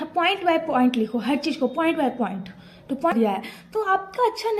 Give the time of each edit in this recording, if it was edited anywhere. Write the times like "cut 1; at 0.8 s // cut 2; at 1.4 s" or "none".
cut 1; at 3.1 s